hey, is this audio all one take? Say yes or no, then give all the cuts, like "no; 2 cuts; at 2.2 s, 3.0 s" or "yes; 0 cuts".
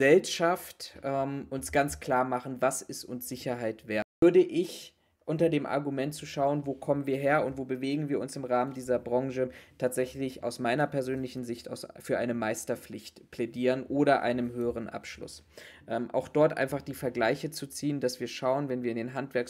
no; 1 cut; at 4.2 s